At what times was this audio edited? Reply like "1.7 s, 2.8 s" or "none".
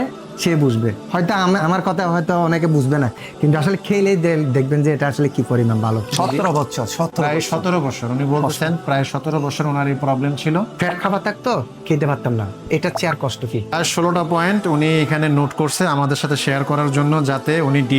6.1 s, 10.7 s